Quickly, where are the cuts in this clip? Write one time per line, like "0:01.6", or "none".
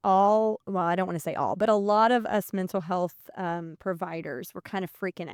none